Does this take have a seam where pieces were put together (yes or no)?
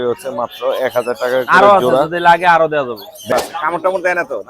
yes